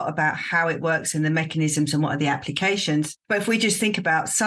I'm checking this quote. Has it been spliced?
yes; 1 cut; at 3.2 s

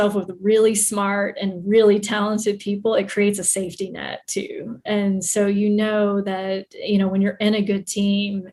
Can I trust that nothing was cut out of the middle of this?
yes; 0 cuts

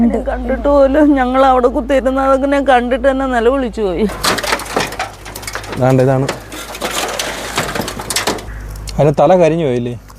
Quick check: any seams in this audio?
yes; 1 cut; at 4.1 s

